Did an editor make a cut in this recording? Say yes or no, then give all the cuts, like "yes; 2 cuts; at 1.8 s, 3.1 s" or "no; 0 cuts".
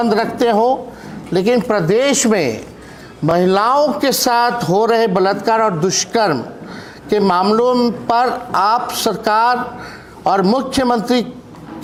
no; 0 cuts